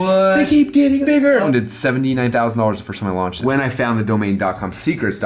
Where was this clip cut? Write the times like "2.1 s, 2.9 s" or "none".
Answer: 1.4 s, 3.4 s